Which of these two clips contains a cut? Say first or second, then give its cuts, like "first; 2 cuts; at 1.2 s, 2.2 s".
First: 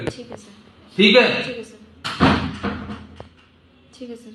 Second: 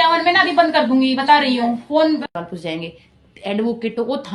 second; 1 cut; at 2.3 s